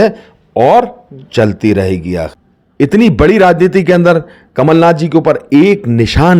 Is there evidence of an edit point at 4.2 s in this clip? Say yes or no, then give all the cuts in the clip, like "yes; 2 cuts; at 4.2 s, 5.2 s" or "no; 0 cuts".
no; 1 cut; at 2.3 s